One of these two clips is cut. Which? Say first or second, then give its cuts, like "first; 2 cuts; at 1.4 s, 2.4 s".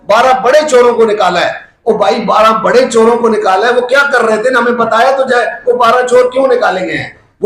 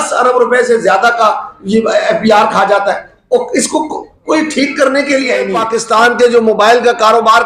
second; 1 cut; at 5.7 s